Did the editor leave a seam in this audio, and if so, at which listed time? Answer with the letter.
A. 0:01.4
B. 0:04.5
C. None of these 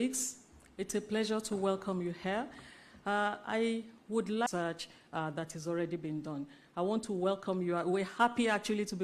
B